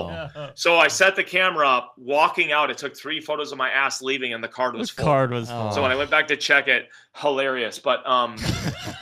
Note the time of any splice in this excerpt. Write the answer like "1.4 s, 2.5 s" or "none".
none